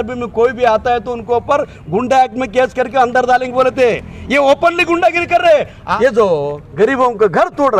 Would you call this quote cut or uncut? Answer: cut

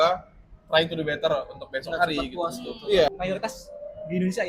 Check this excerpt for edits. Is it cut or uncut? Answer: cut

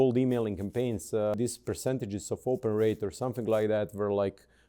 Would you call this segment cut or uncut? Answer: cut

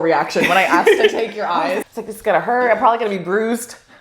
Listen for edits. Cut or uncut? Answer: cut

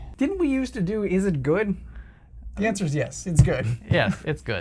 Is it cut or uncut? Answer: uncut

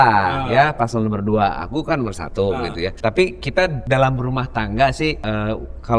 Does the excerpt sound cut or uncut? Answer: cut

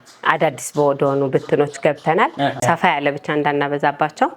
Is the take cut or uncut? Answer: cut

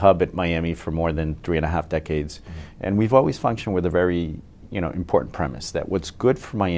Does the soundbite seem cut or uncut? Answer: uncut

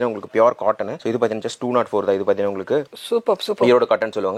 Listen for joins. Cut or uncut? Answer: uncut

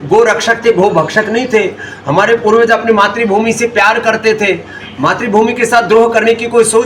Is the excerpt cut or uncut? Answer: uncut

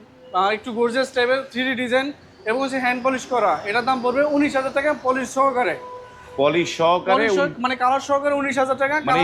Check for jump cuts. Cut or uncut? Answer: uncut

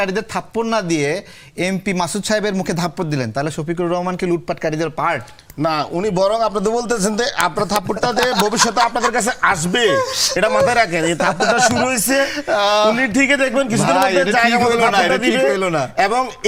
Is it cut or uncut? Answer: uncut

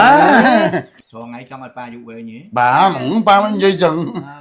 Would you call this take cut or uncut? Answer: cut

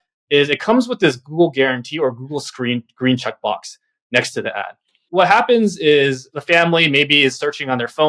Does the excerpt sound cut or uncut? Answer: cut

